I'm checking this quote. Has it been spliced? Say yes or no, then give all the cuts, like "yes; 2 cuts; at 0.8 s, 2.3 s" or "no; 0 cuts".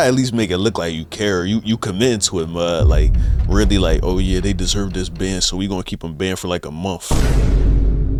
no; 0 cuts